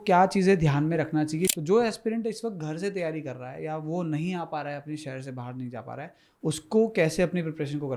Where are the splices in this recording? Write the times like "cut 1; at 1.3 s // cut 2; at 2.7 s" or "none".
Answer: cut 1; at 1.5 s

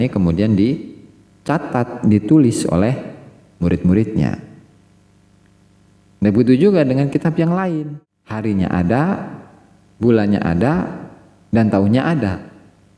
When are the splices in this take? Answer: cut 1; at 7.8 s

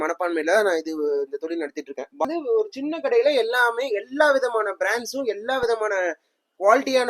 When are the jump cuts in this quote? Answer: cut 1; at 2.2 s

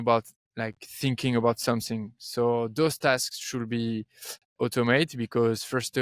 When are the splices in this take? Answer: none

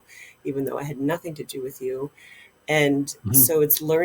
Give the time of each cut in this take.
none

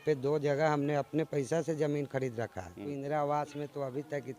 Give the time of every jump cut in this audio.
cut 1; at 2.9 s

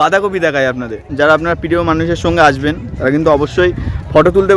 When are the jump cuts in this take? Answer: cut 1; at 1.1 s

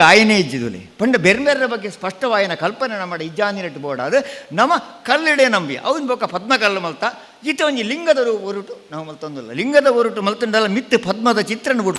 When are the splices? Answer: none

